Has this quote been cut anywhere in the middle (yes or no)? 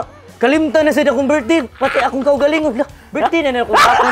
no